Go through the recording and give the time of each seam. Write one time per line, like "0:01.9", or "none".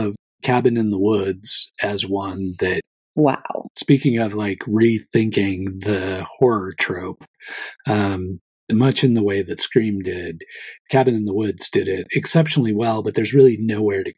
0:03.0
0:03.7

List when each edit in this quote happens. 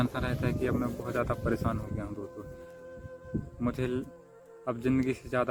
none

